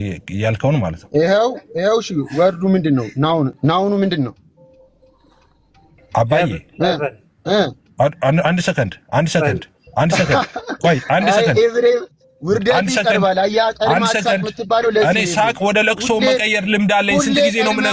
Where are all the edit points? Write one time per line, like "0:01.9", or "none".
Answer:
0:03.6